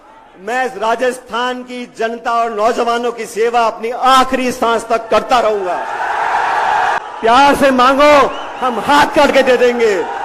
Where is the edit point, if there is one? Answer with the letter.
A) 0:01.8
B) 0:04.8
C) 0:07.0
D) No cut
C